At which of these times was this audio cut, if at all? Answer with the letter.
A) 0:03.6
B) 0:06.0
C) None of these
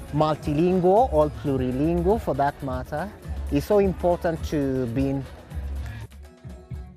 B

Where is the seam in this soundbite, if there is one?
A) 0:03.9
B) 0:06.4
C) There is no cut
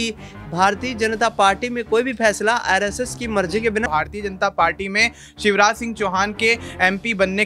A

